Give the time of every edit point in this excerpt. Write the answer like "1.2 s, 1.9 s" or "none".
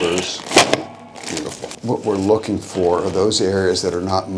1.7 s